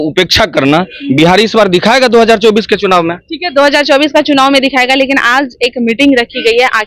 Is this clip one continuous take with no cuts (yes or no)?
yes